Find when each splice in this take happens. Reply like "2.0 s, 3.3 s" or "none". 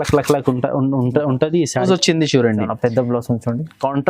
1.8 s